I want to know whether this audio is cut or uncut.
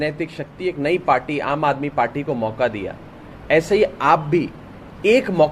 uncut